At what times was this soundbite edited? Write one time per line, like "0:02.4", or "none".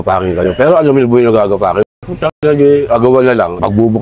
none